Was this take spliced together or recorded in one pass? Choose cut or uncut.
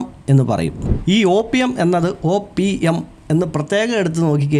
cut